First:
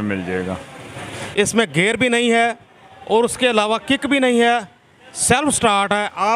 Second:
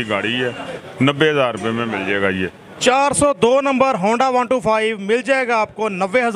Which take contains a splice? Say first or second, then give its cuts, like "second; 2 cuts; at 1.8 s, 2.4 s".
first; 1 cut; at 1.1 s